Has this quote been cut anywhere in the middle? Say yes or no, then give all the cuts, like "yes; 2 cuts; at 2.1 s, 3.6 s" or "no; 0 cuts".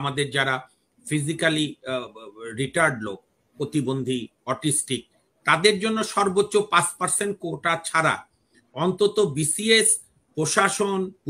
no; 0 cuts